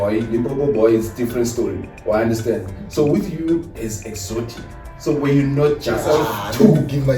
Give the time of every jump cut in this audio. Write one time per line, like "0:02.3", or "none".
0:06.1